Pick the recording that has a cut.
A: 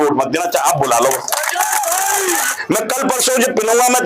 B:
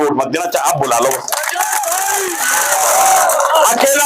A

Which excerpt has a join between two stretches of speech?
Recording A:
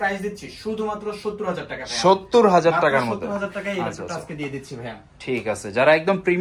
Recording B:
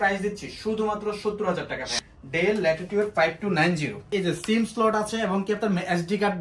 B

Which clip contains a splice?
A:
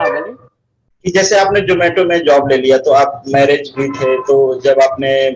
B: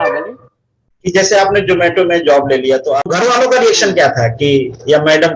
B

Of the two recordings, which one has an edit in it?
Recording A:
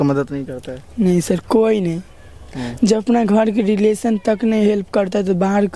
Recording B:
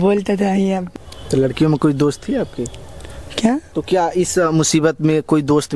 B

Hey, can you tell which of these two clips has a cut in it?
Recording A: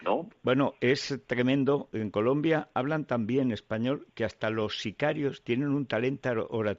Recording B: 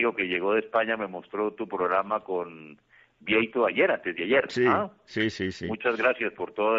A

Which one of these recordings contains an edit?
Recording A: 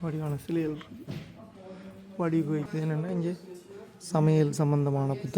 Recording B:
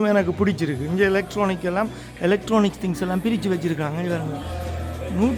A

